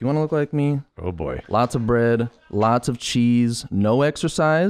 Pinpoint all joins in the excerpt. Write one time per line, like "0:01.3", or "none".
0:00.9